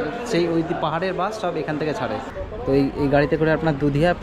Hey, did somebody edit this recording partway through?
yes; 1 cut; at 2.3 s

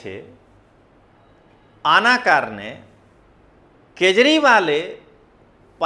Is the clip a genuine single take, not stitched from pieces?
yes; 0 cuts

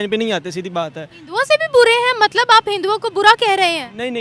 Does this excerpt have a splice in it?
no; 0 cuts

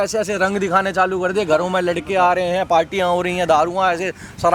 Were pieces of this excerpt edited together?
no; 0 cuts

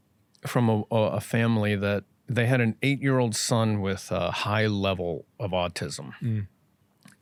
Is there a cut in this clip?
no; 0 cuts

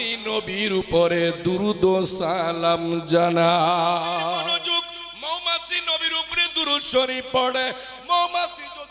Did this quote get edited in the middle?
yes; 1 cut; at 4.5 s

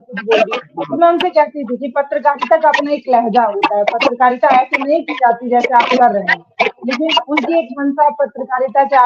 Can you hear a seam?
no; 0 cuts

